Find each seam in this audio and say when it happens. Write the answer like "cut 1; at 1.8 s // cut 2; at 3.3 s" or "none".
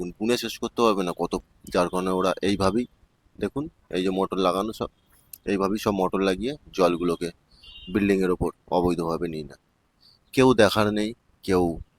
cut 1; at 1.4 s